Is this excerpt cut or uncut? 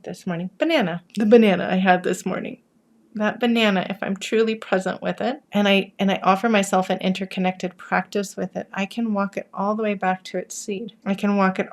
cut